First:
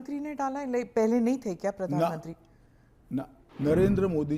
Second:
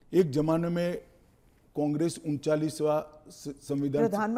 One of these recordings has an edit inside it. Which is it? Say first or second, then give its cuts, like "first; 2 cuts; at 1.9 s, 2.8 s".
first; 1 cut; at 3.4 s